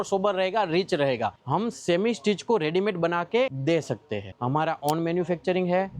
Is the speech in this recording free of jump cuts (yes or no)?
no